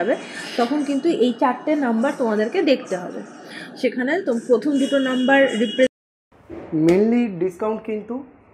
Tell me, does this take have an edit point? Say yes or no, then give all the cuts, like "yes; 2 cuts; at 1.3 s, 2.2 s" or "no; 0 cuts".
yes; 1 cut; at 5.9 s